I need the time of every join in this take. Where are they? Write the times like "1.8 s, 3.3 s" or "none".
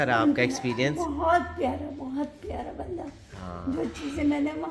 none